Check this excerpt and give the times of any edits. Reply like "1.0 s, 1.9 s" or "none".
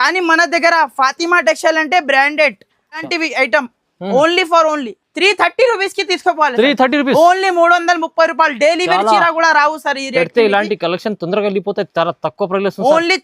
3.0 s